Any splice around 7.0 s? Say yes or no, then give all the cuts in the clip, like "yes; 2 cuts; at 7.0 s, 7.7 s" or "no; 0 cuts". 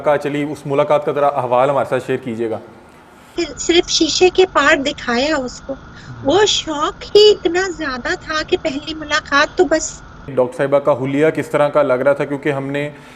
no; 2 cuts; at 3.2 s, 10.3 s